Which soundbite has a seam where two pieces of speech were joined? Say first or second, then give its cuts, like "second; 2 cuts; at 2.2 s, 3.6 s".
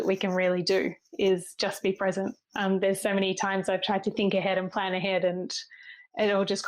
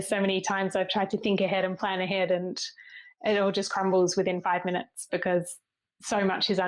second; 1 cut; at 5.7 s